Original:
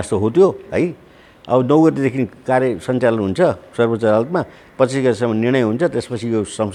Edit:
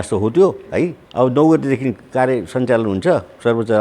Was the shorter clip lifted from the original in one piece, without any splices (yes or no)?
no